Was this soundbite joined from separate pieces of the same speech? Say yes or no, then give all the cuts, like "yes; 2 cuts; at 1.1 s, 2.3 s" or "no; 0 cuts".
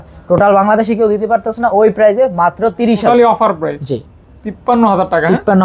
yes; 1 cut; at 3.0 s